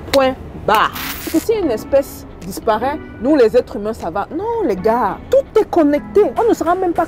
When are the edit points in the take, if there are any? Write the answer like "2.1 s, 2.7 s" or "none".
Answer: 1.3 s